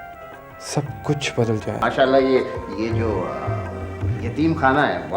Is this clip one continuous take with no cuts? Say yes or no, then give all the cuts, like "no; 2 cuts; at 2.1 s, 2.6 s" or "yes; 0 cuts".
no; 1 cut; at 1.8 s